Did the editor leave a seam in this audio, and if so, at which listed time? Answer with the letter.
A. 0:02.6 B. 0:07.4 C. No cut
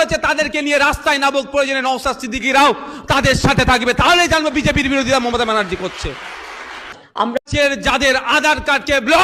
B